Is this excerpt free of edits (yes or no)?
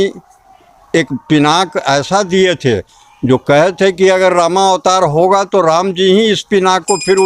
yes